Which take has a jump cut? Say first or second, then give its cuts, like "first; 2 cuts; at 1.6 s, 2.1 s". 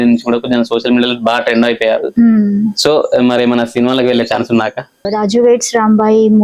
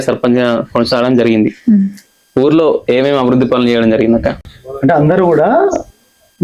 first; 1 cut; at 5.1 s